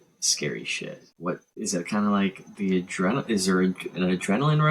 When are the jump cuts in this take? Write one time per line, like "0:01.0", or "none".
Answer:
0:01.5